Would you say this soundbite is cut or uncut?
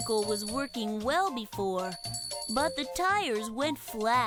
uncut